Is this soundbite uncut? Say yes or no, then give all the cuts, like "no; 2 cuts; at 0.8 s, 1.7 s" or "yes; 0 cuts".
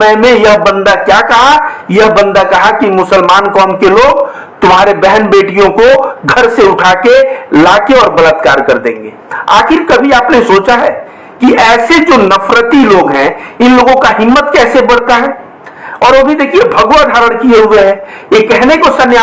yes; 0 cuts